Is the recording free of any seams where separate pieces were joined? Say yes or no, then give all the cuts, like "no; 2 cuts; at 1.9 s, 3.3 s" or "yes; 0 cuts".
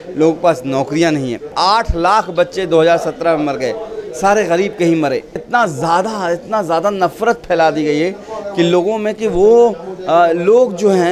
no; 2 cuts; at 1.5 s, 5.4 s